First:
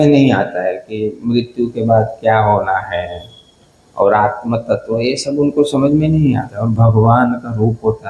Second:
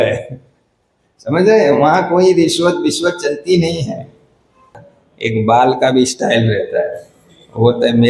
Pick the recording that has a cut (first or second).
second